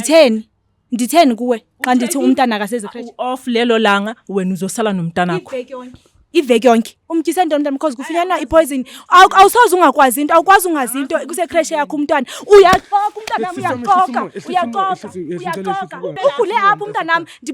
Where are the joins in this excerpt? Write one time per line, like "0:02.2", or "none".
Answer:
0:07.0
0:16.2